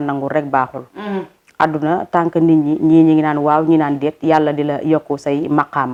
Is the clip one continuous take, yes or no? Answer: yes